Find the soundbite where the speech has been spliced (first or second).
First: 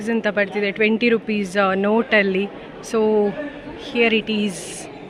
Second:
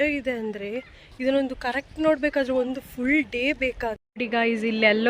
second